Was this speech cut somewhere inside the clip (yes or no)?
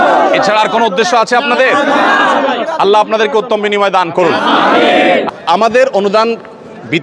yes